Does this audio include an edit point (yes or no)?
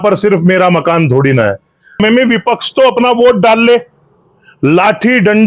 yes